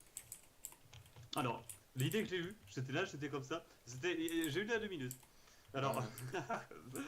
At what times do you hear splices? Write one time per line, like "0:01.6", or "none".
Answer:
0:02.6